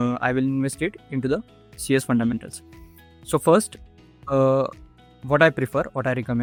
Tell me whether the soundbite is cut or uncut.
uncut